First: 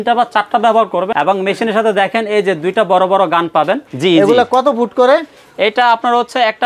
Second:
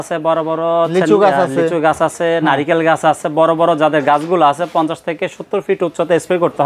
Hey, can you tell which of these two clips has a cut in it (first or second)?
first